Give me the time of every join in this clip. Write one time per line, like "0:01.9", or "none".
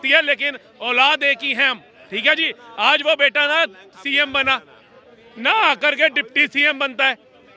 none